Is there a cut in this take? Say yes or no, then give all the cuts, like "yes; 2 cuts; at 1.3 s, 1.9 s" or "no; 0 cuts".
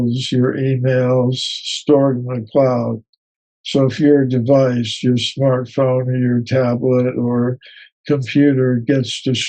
no; 0 cuts